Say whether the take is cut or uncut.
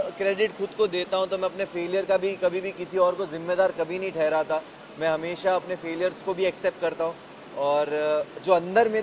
uncut